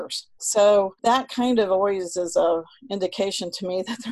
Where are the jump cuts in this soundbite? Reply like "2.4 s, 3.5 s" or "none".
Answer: 0.9 s